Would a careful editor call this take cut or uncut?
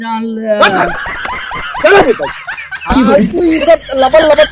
uncut